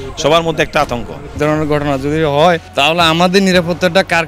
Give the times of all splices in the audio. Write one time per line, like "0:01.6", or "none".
0:01.4
0:02.7

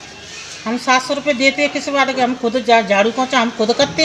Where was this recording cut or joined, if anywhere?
none

